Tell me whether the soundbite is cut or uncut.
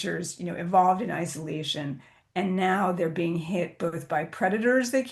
uncut